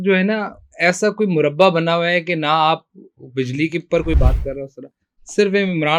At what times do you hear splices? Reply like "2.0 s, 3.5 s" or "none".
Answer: none